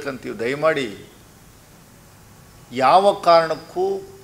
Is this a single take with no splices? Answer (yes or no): yes